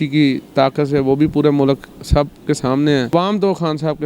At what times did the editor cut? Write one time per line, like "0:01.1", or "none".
0:03.1